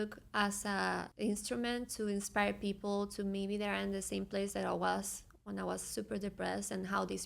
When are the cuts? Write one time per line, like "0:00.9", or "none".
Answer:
0:01.1